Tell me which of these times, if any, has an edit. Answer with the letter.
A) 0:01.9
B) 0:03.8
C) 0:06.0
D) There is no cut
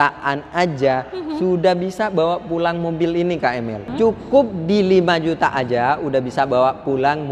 B